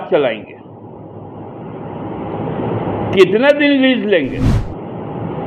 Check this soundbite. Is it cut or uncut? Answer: cut